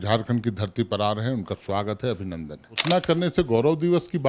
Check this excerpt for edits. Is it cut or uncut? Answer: cut